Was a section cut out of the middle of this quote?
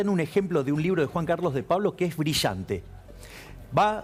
no; 0 cuts

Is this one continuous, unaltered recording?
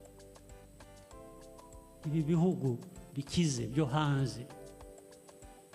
no; 2 cuts; at 2.0 s, 4.5 s

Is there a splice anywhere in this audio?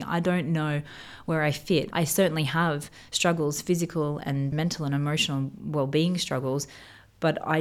yes; 2 cuts; at 1.9 s, 4.5 s

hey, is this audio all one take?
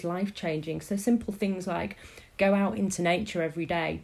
yes; 0 cuts

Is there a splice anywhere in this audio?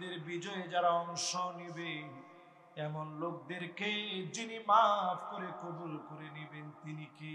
no; 0 cuts

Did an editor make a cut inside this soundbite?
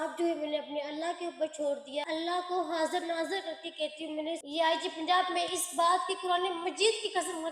yes; 2 cuts; at 2.0 s, 4.4 s

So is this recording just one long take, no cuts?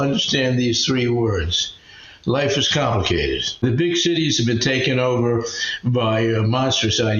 no; 1 cut; at 3.6 s

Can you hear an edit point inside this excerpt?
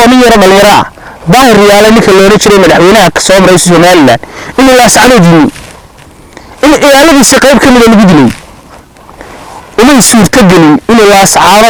no; 0 cuts

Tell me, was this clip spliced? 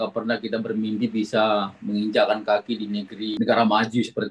yes; 1 cut; at 3.3 s

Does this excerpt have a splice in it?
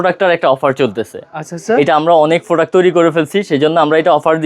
no; 0 cuts

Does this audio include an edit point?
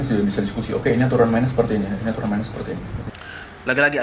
yes; 1 cut; at 3.1 s

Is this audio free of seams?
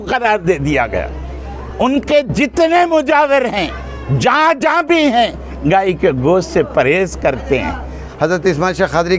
no; 1 cut; at 8.0 s

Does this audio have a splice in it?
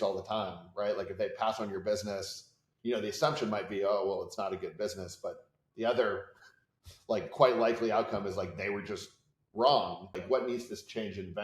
yes; 1 cut; at 10.2 s

